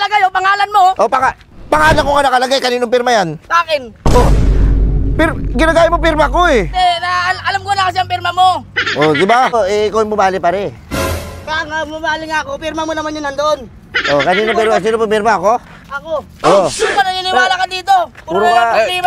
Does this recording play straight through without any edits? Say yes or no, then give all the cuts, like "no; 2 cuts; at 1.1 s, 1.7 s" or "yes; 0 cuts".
no; 1 cut; at 9.5 s